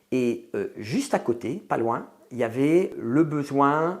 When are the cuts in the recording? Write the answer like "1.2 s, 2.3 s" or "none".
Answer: none